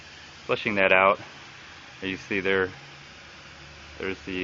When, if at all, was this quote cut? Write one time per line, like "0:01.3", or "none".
0:01.4